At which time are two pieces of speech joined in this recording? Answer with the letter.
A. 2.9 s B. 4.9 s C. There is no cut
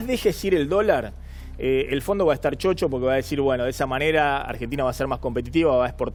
C